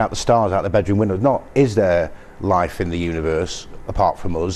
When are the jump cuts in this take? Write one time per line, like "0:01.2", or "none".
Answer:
0:02.1

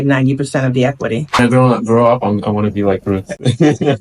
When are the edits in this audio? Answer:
0:01.4

